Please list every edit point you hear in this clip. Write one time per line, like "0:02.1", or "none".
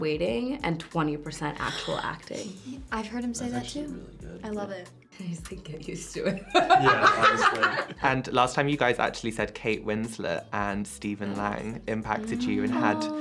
none